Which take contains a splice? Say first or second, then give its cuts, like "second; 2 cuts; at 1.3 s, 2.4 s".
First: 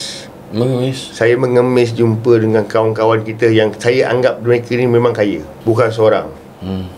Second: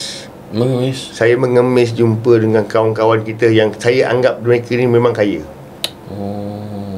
first; 1 cut; at 5.5 s